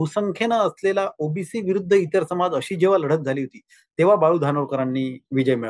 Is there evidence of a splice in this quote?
no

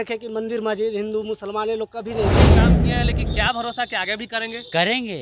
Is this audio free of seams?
no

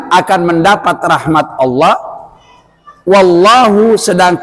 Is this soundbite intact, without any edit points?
yes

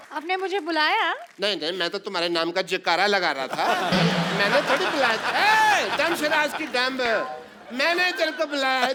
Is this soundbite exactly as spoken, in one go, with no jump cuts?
yes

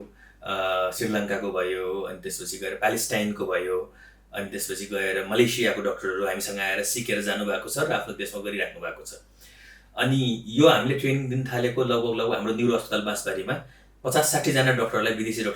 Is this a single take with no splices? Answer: yes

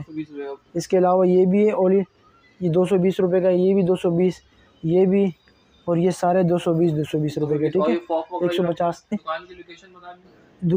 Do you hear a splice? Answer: yes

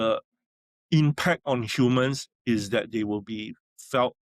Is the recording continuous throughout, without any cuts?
yes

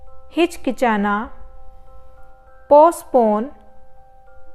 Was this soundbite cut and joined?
yes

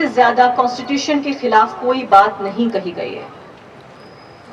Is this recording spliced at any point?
no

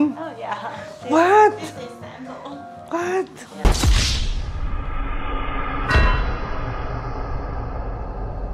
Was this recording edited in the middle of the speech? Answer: no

